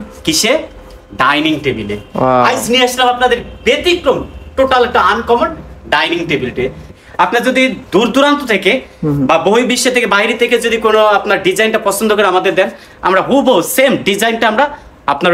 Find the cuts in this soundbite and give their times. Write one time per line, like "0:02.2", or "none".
0:06.9